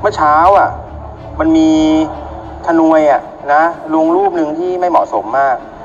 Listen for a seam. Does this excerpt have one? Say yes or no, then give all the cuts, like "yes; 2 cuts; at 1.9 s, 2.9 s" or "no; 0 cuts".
no; 0 cuts